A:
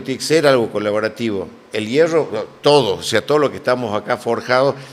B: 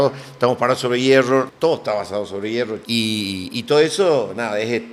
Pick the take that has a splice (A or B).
B